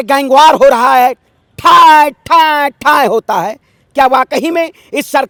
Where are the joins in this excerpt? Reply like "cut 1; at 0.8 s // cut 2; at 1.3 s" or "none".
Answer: none